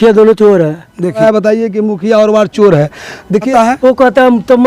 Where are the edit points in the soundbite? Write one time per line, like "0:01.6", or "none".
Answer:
0:01.2
0:03.5